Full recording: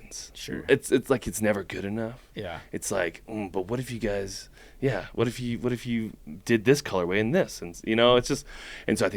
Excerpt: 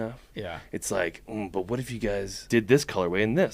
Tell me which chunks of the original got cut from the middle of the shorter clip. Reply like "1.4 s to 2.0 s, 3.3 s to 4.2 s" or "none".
4.4 s to 6.3 s